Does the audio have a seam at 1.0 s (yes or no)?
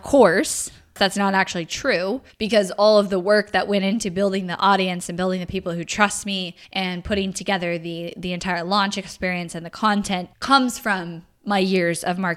yes